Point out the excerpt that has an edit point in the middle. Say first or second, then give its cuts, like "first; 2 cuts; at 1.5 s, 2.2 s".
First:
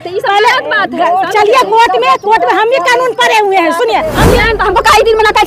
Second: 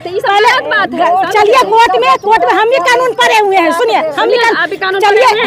first; 1 cut; at 4.4 s